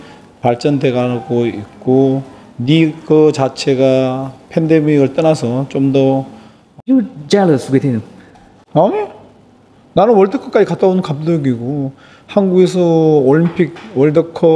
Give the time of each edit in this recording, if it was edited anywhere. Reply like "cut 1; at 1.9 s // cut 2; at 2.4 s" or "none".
cut 1; at 6.9 s